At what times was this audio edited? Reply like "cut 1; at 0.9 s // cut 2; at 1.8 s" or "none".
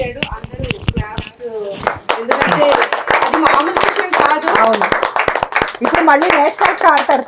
none